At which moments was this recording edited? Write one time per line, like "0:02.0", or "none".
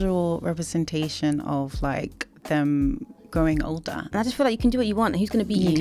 0:04.1